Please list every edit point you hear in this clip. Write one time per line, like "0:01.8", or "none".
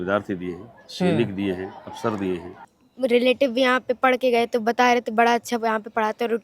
0:02.7